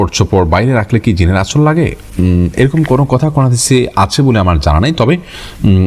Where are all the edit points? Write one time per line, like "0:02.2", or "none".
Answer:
none